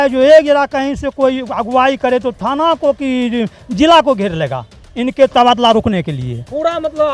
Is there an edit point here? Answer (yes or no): no